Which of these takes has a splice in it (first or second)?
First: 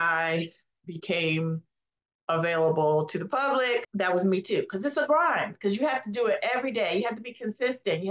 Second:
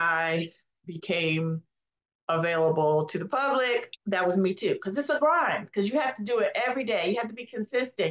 first